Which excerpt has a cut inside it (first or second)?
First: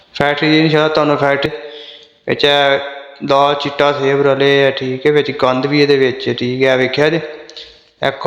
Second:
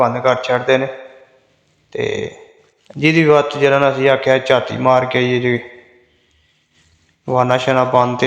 first